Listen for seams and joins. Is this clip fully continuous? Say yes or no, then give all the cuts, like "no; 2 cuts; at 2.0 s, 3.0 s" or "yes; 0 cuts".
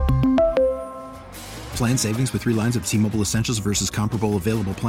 yes; 0 cuts